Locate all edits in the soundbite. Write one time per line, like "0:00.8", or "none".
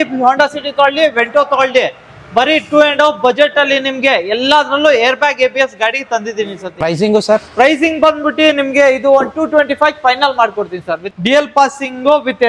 0:06.7
0:11.0